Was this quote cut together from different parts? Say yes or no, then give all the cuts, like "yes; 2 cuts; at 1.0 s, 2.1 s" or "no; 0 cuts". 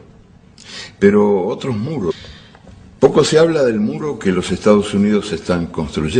no; 0 cuts